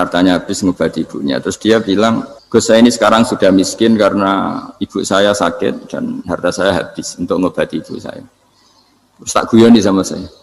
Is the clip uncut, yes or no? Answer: no